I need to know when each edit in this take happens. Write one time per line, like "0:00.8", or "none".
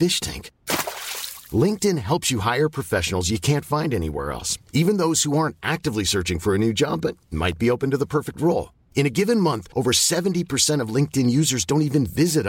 none